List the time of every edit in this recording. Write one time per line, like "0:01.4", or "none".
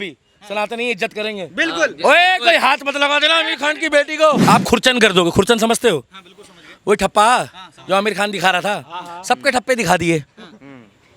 0:04.4